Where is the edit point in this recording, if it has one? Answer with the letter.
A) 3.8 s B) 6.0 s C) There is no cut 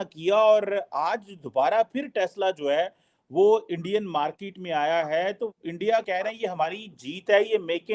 B